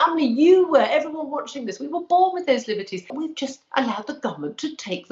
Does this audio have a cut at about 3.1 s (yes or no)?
yes